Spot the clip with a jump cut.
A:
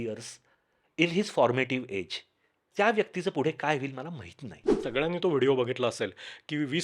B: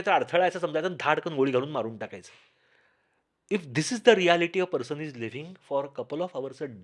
A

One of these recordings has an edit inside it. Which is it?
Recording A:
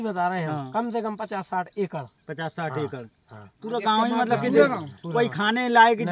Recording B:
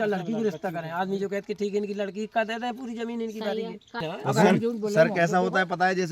B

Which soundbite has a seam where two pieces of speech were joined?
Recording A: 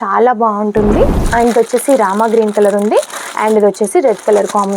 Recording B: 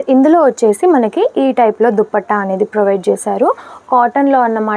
A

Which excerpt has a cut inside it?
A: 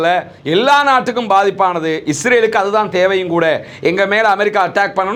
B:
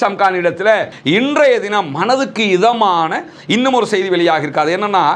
B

